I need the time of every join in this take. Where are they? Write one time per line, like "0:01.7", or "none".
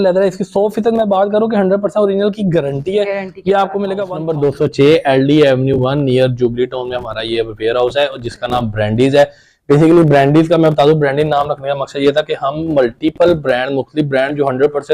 0:04.2